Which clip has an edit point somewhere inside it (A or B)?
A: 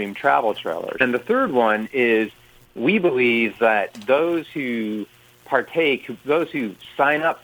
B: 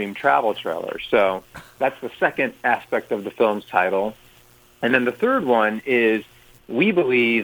A